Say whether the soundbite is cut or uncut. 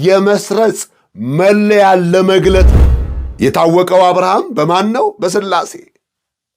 cut